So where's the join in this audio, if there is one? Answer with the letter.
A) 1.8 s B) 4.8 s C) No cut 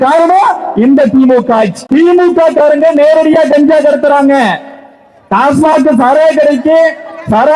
A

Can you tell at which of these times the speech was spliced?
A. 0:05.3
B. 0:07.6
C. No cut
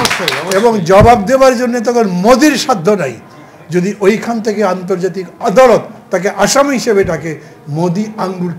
C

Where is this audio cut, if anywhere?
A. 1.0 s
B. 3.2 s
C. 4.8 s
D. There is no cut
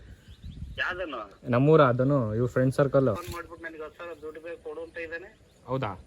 B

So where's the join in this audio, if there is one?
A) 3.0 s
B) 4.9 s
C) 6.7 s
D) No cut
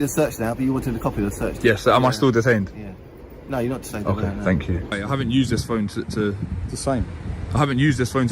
B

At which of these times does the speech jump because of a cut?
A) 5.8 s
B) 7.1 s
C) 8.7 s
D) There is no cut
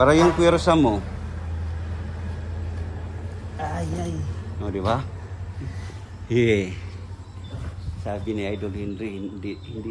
D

